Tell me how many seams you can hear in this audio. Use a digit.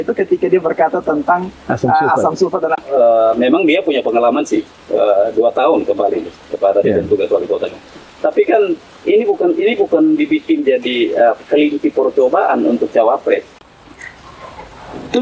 2